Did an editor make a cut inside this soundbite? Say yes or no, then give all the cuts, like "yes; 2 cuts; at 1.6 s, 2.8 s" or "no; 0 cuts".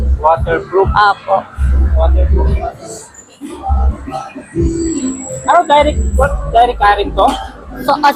no; 0 cuts